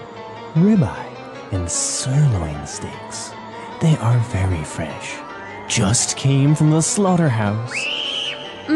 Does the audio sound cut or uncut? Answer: uncut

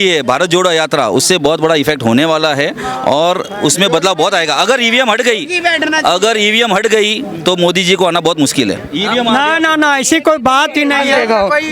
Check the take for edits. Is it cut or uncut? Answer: uncut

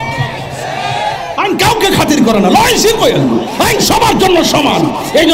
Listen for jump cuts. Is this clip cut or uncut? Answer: uncut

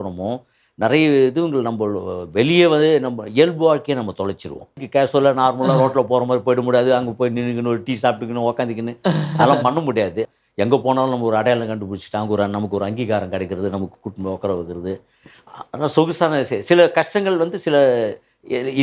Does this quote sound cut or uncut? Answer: cut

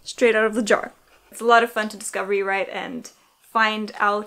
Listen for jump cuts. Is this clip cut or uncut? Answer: cut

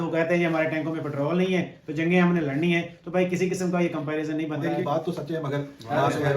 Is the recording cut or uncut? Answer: cut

